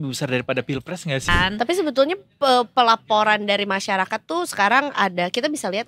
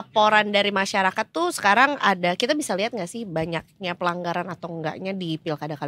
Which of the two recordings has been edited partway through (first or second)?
first